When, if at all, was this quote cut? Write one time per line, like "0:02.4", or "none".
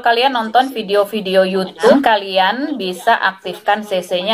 0:01.9